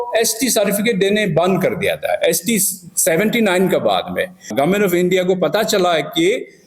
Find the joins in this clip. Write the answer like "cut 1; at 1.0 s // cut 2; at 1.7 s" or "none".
cut 1; at 4.5 s